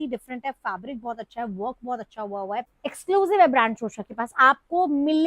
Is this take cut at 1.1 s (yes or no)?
no